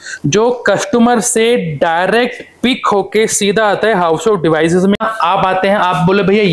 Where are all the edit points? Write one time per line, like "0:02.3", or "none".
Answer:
0:05.0